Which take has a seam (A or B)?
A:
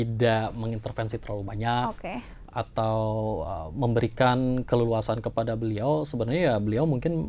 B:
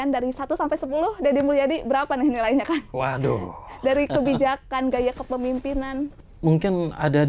B